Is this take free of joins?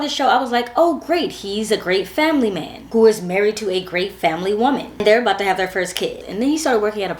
yes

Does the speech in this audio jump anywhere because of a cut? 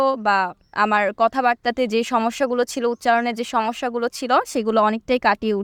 no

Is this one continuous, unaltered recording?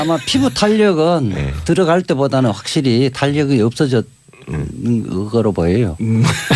no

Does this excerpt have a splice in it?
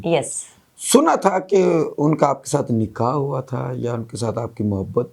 no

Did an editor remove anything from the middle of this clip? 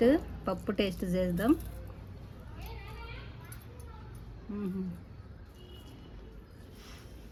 no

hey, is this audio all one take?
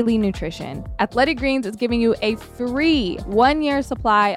no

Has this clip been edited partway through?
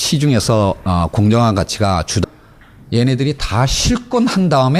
no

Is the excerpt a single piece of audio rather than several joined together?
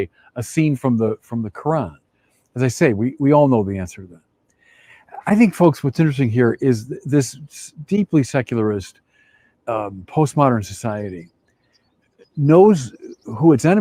yes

